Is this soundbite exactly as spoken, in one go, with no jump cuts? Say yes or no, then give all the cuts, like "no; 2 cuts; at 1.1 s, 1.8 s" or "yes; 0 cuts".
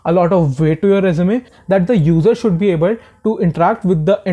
no; 1 cut; at 1.5 s